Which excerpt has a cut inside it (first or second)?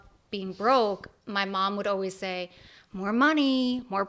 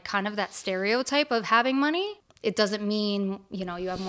second